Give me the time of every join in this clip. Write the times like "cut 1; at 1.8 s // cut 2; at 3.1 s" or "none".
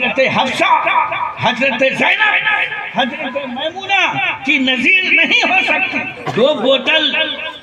cut 1; at 6.1 s